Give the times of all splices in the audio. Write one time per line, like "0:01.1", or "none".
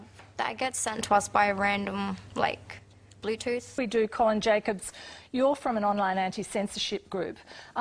0:02.2